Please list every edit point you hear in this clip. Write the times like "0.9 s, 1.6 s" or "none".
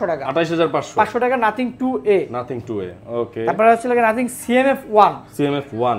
none